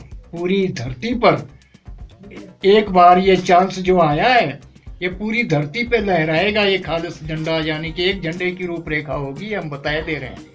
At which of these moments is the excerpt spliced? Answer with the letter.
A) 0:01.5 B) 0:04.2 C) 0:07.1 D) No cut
D